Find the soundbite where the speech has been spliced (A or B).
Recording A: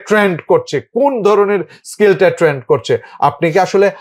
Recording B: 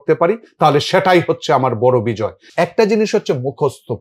B